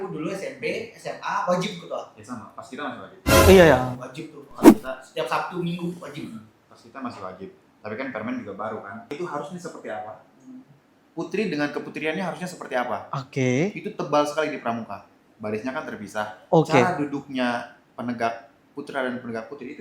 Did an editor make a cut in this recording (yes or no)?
yes